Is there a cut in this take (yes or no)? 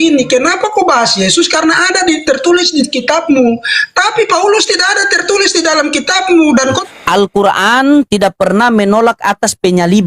yes